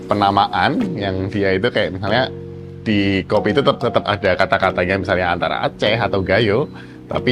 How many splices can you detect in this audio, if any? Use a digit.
0